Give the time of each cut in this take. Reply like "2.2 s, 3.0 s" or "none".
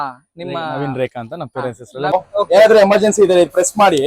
2.1 s